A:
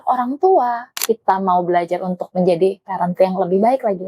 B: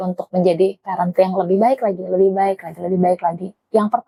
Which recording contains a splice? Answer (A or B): A